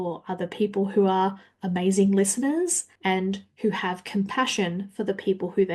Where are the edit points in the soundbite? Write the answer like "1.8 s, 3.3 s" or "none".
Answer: 2.9 s